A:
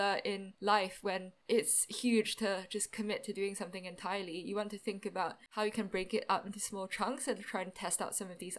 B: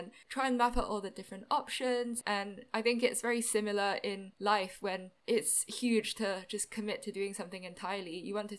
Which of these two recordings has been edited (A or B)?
B